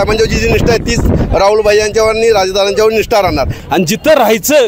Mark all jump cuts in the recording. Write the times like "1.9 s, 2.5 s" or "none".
3.6 s